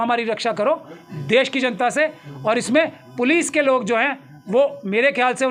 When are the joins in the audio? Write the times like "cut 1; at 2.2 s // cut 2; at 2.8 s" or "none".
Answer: none